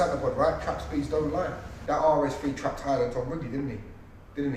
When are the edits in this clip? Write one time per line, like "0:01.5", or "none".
0:01.7